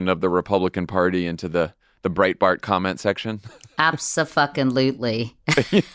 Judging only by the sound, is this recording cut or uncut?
uncut